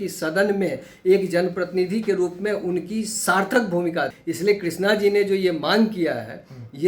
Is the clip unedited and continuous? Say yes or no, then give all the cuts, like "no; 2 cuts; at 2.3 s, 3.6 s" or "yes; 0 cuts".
no; 1 cut; at 4.2 s